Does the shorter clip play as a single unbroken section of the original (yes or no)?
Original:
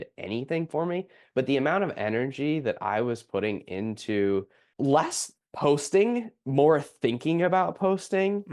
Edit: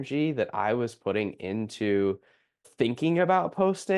no